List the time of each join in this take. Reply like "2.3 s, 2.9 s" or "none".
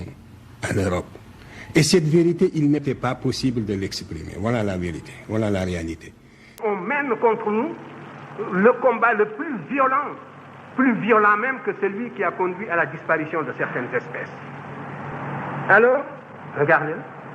6.6 s, 15.0 s